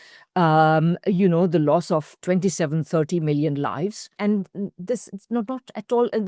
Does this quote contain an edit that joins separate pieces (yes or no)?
yes